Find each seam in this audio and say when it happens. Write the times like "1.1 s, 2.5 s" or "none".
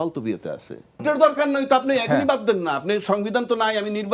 1.0 s